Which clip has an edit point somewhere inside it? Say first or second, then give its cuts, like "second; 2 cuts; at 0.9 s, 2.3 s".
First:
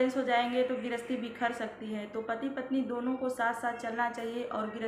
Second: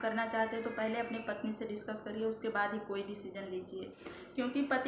second; 1 cut; at 3.9 s